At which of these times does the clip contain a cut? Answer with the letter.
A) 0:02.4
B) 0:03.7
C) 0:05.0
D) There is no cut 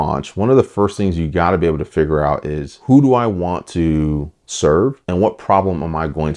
C